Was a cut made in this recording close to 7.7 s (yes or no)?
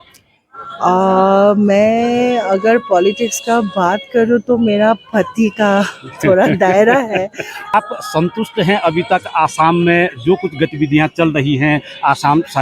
yes